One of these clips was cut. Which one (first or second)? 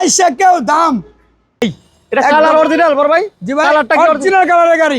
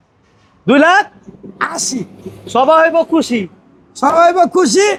first